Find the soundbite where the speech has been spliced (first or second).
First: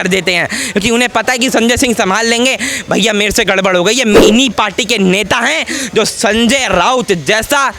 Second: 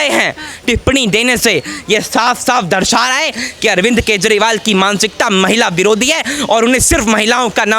first